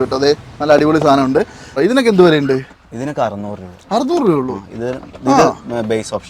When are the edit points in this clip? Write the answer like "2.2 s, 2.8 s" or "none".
1.7 s